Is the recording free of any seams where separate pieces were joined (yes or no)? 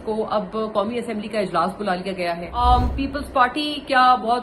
no